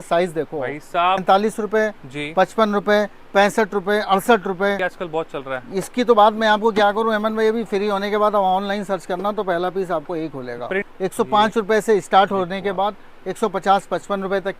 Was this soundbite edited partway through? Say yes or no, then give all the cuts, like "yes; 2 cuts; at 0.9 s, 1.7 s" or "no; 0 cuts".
yes; 3 cuts; at 1.2 s, 4.9 s, 10.9 s